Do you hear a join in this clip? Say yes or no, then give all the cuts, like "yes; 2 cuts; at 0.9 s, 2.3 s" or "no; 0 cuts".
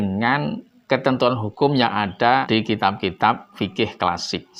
no; 0 cuts